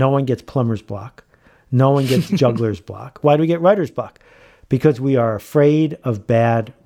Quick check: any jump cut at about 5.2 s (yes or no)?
no